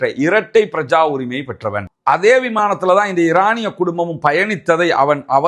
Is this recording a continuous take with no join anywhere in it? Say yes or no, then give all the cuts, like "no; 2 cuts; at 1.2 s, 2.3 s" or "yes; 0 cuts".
no; 1 cut; at 1.9 s